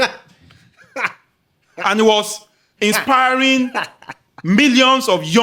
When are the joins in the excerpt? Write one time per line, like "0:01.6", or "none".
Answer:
none